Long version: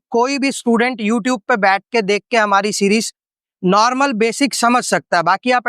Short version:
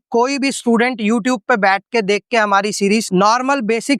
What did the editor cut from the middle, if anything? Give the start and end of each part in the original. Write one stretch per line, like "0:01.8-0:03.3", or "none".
0:03.1-0:03.6